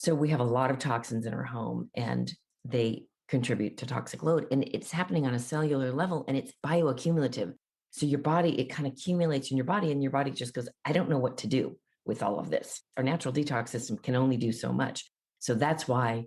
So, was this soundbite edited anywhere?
no; 0 cuts

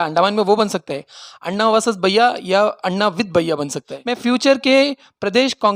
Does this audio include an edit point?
yes; 1 cut; at 3.9 s

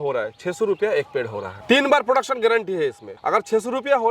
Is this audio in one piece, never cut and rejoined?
no; 2 cuts; at 1.5 s, 3.1 s

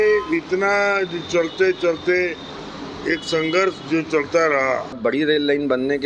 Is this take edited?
yes; 1 cut; at 5.0 s

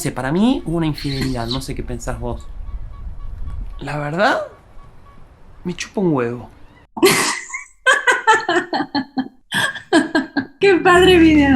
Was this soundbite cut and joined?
yes; 2 cuts; at 9.5 s, 10.5 s

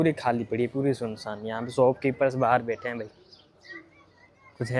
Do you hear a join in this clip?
no; 0 cuts

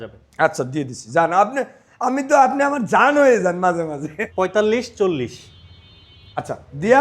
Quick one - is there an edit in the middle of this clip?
yes; 1 cut; at 4.1 s

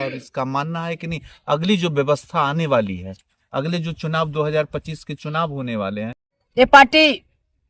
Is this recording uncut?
no; 1 cut; at 6.4 s

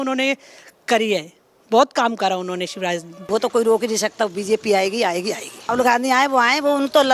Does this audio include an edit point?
yes; 2 cuts; at 3.1 s, 5.6 s

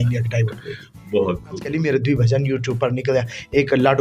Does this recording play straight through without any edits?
no; 1 cut; at 1.7 s

